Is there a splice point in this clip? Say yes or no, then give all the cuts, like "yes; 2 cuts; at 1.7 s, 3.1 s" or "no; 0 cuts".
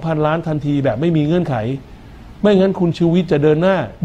no; 0 cuts